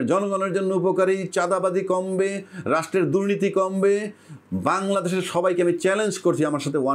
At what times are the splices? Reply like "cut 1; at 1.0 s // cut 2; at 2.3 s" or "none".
none